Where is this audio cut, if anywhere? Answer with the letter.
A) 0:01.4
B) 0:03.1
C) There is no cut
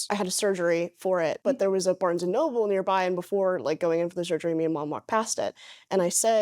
A